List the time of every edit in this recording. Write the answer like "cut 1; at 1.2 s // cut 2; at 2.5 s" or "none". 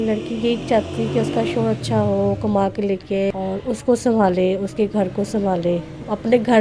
cut 1; at 3.3 s